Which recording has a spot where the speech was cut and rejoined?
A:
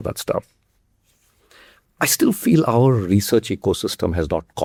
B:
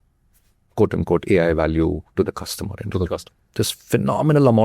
B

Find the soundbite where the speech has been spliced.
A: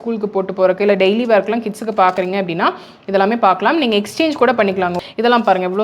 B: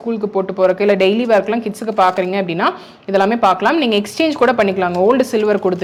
A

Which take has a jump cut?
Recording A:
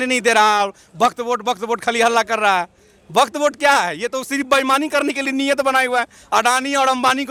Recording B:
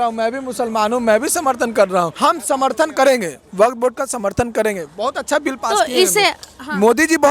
B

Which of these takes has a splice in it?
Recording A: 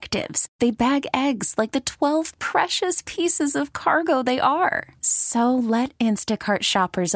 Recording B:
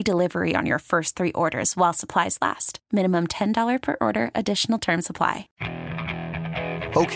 B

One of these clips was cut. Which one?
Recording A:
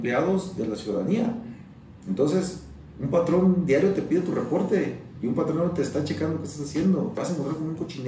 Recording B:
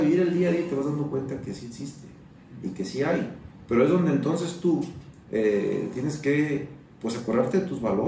A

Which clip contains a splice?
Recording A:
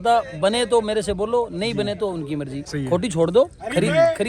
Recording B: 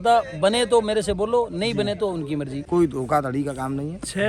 B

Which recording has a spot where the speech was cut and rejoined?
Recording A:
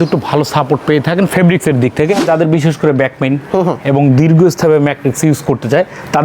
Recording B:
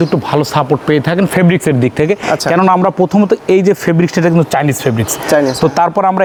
A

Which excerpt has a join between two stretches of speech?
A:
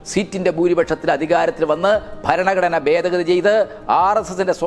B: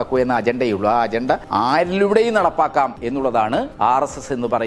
B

